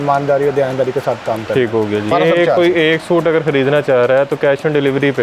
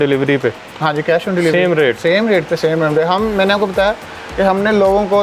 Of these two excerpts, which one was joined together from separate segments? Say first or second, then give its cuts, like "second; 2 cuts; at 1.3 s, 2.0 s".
first; 1 cut; at 2.1 s